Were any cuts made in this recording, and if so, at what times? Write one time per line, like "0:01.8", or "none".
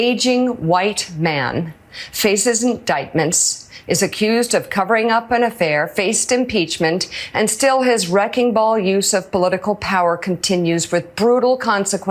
none